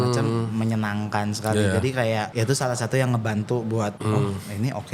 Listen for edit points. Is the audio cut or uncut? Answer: cut